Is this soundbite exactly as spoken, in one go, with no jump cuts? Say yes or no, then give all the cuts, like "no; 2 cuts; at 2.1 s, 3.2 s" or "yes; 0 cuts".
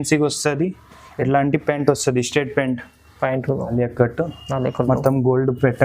no; 1 cut; at 3.7 s